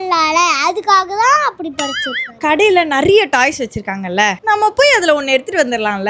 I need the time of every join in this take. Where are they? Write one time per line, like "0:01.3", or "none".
0:02.3